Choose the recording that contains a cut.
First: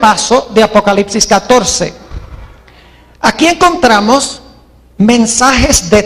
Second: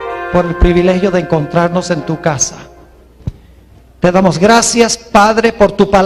first; 1 cut; at 1.0 s

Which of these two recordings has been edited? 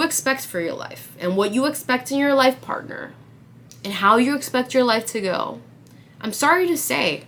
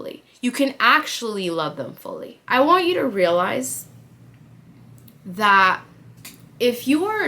second; 1 cut; at 2.3 s

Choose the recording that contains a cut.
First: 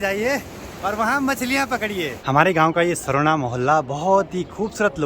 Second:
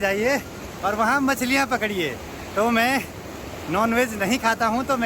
first; 1 cut; at 2.2 s

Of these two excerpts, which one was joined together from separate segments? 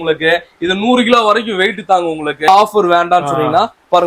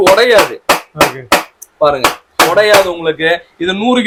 first; 1 cut; at 2.5 s

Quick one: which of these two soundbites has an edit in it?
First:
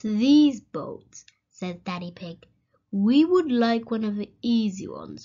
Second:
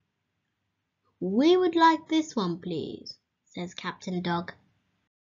second; 1 cut; at 1.7 s

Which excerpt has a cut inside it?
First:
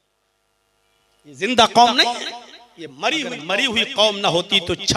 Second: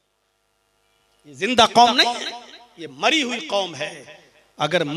first; 1 cut; at 3.5 s

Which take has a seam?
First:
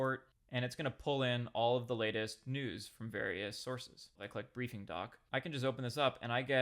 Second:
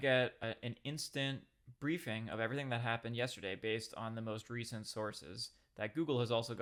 first; 2 cuts; at 4.2 s, 5.2 s

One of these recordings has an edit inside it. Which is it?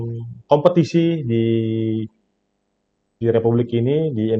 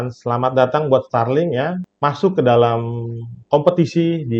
second; 1 cut; at 1.9 s

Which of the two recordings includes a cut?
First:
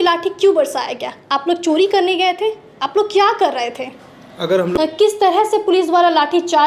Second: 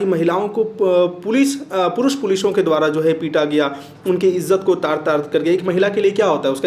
first; 1 cut; at 4.7 s

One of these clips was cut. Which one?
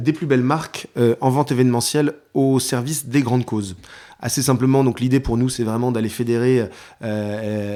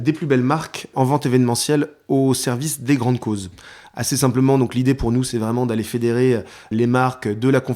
second; 2 cuts; at 0.9 s, 6.6 s

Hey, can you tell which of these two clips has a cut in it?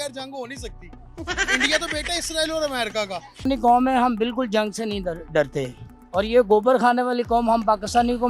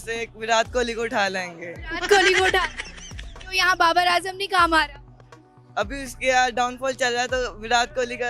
first; 1 cut; at 3.5 s

